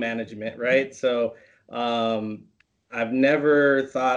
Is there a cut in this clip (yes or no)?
no